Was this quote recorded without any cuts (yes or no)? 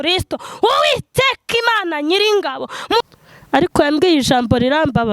no